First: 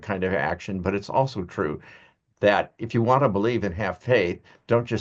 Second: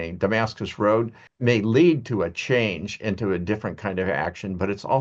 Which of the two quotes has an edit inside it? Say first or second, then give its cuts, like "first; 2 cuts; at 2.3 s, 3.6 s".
second; 1 cut; at 1.2 s